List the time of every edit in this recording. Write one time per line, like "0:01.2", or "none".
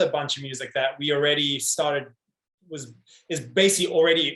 none